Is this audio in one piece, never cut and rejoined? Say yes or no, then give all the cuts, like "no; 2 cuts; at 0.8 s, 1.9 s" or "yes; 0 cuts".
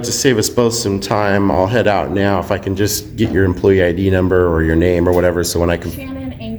yes; 0 cuts